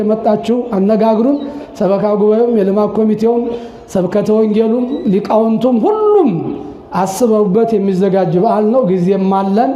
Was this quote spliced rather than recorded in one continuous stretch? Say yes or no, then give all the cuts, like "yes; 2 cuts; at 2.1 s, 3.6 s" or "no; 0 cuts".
no; 0 cuts